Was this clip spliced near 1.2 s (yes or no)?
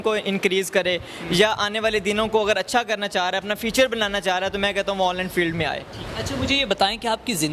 no